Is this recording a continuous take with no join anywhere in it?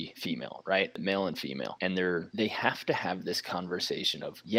no; 1 cut; at 1.0 s

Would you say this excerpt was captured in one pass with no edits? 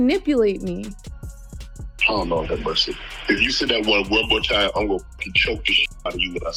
yes; 0 cuts

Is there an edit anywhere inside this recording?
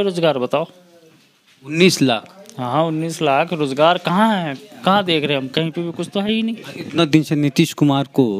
no; 0 cuts

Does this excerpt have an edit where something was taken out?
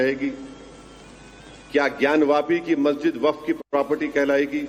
no; 0 cuts

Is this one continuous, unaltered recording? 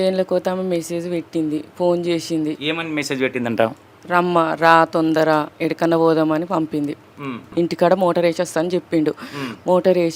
no; 2 cuts; at 5.5 s, 7.4 s

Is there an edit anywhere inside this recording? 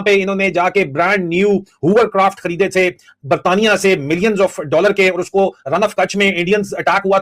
no; 0 cuts

